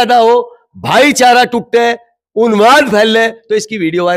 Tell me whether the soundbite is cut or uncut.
uncut